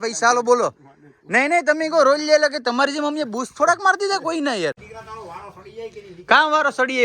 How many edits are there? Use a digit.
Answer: 1